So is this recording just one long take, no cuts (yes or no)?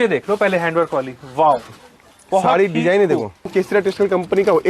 no